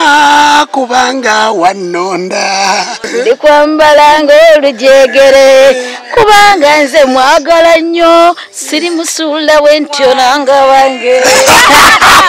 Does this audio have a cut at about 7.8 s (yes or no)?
no